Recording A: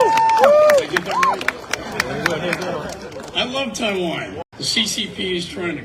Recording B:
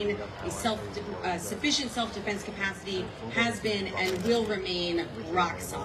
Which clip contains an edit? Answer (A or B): A